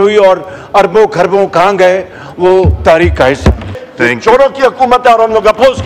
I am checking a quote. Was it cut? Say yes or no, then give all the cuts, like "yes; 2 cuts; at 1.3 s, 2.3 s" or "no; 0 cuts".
yes; 1 cut; at 3.7 s